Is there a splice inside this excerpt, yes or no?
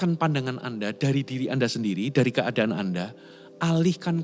no